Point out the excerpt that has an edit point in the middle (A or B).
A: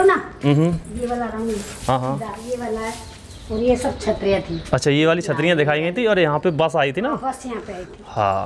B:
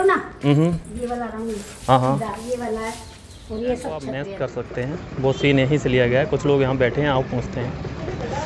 B